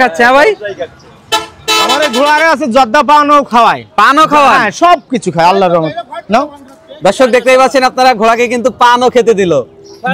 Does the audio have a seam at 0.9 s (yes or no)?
no